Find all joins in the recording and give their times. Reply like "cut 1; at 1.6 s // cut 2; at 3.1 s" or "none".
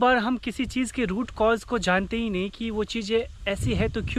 none

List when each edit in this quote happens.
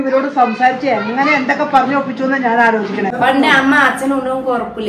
cut 1; at 3.1 s

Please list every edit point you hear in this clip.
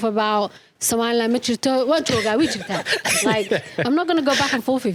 none

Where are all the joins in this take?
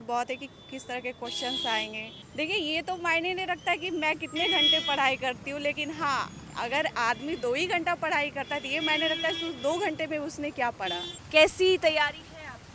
cut 1; at 2.2 s // cut 2; at 11.1 s

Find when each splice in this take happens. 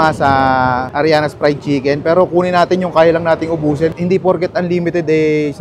cut 1; at 3.9 s

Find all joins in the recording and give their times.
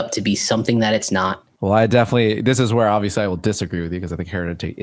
cut 1; at 1.5 s

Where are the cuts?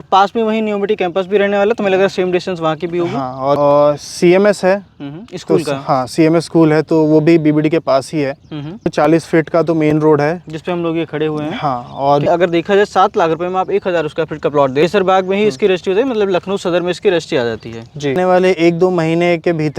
cut 1; at 3.6 s // cut 2; at 8.9 s // cut 3; at 12.3 s // cut 4; at 14.8 s // cut 5; at 18.2 s

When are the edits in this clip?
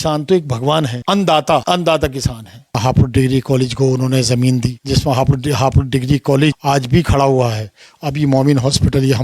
cut 1; at 1.0 s // cut 2; at 1.6 s // cut 3; at 2.8 s // cut 4; at 4.8 s // cut 5; at 6.6 s

